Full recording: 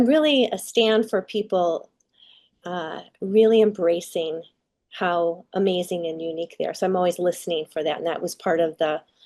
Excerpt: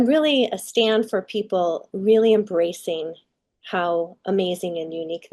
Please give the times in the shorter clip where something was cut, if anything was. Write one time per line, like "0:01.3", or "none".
0:01.9

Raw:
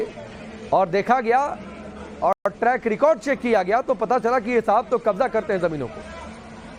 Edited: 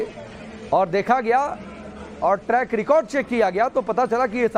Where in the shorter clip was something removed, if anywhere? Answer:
0:02.3

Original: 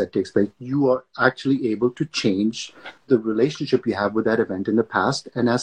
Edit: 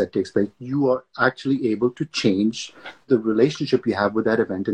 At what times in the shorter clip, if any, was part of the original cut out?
none

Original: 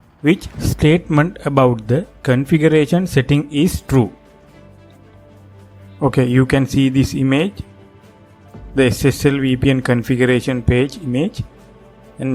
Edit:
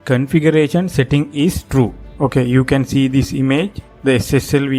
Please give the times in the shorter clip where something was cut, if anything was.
0:02.0
0:03.8

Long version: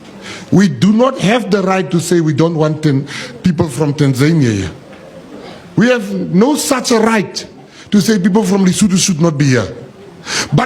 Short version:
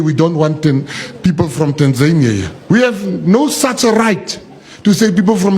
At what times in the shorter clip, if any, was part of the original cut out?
0:02.5

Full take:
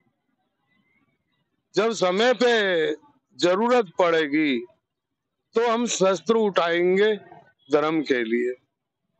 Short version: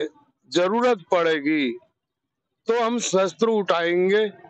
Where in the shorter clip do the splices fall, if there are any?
none

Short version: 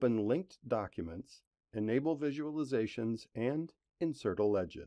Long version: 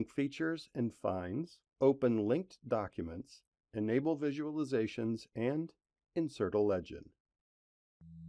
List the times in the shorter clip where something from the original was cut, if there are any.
0:03.8

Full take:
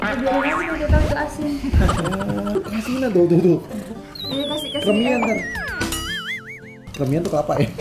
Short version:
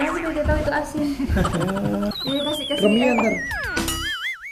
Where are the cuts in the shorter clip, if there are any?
0:02.1

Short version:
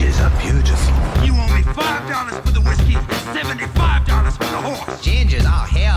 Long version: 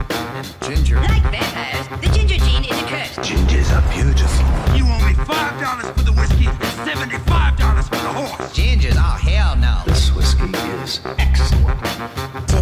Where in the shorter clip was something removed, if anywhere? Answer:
none

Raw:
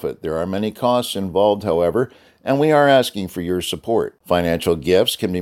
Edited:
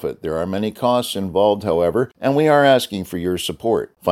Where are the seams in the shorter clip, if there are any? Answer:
0:02.1

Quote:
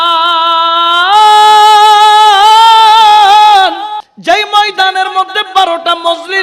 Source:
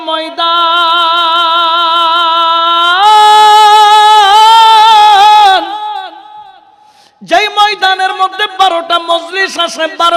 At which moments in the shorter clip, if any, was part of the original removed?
0:04.1

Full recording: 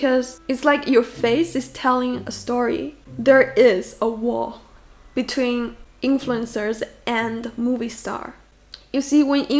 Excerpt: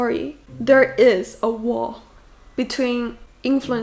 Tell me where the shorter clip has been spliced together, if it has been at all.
none

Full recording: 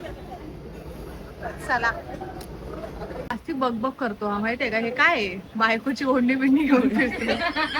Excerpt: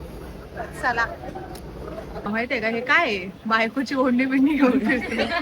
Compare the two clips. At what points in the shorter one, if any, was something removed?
0:02.3

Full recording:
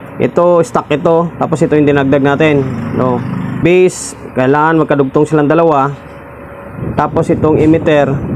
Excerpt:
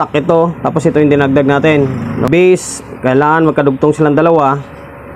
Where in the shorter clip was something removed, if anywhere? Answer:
0:02.2

